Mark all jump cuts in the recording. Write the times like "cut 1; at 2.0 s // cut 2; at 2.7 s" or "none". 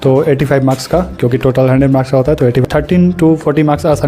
cut 1; at 2.6 s

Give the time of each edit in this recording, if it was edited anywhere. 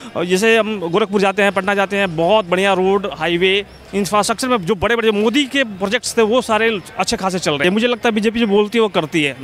cut 1; at 7.6 s

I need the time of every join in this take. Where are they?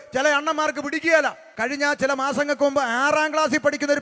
cut 1; at 1.5 s

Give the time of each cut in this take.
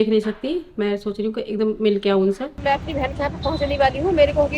cut 1; at 2.6 s

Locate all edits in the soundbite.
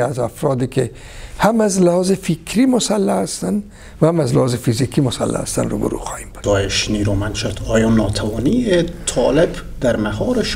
cut 1; at 6.4 s

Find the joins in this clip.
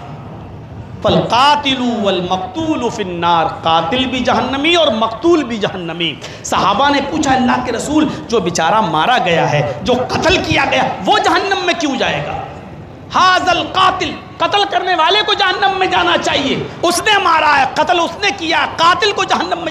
none

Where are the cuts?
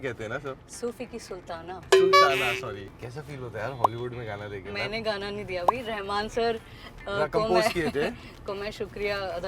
cut 1; at 1.9 s // cut 2; at 2.8 s

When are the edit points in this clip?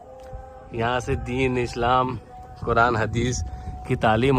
none

